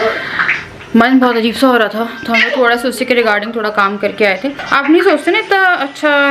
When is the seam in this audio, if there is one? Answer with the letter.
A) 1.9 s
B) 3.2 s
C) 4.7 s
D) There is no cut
C